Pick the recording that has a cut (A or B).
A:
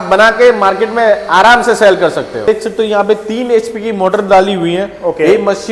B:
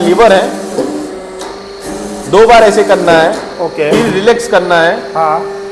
A